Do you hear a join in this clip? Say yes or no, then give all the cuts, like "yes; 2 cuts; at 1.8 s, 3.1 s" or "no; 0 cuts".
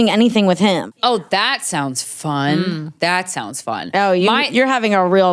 yes; 1 cut; at 1.0 s